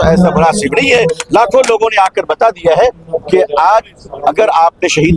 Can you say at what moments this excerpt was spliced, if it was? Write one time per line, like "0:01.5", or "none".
none

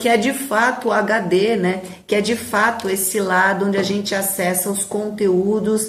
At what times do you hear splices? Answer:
none

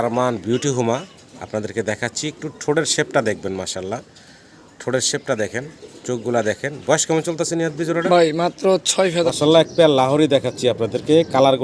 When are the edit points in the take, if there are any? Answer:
0:09.3

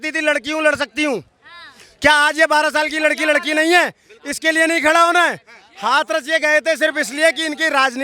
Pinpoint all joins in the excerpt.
none

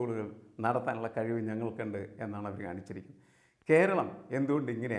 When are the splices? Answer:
none

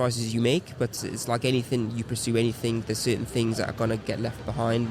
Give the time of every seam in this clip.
0:00.9

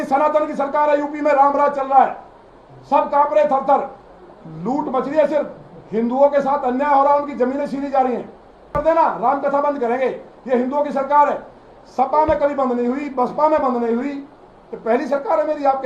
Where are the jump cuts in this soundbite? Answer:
0:08.7

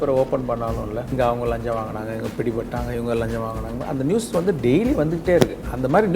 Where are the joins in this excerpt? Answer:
0:01.1

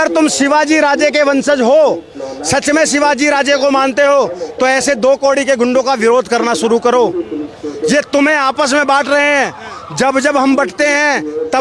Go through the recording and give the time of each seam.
none

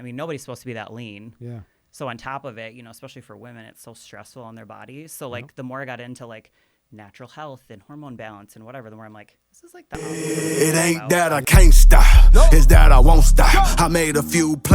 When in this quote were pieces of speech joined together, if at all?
0:09.9

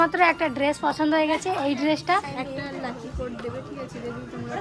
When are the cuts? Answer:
0:02.3

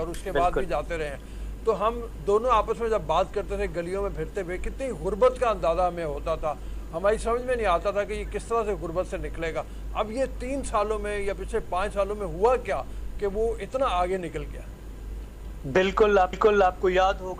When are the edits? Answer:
none

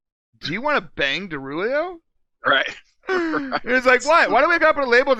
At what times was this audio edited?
none

